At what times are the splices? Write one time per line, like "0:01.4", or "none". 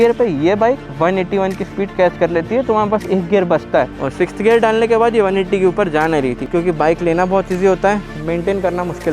0:03.9
0:06.5